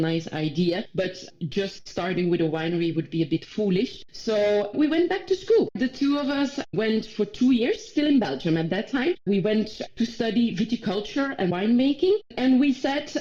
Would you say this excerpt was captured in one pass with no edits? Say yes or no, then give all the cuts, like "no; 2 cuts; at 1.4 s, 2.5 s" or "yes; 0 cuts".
yes; 0 cuts